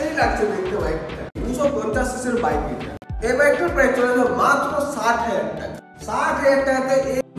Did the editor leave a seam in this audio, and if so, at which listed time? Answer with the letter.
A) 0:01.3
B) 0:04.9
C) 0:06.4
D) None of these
A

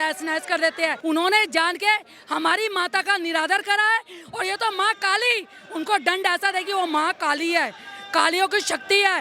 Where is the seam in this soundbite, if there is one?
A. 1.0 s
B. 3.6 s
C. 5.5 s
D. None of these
A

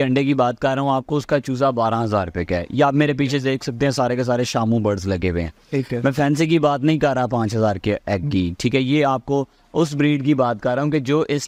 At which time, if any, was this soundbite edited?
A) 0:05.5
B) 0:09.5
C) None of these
C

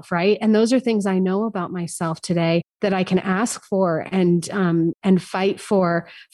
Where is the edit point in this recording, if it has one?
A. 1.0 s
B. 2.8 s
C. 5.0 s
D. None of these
C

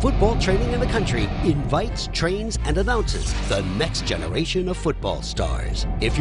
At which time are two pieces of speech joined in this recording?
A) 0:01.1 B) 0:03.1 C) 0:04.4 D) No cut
D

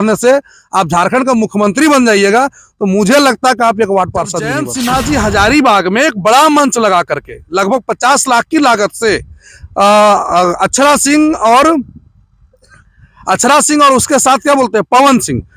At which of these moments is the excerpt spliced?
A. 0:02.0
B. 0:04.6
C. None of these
B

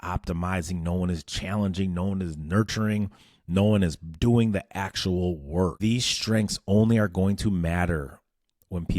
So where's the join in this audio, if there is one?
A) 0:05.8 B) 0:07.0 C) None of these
A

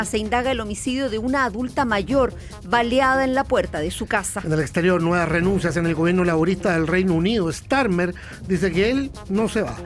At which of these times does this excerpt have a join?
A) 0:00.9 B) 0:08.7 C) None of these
C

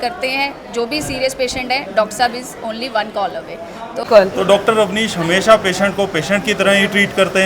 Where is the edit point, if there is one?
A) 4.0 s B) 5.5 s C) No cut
A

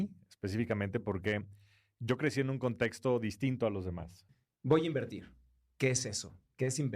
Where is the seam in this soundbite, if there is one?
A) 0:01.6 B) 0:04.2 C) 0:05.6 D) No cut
B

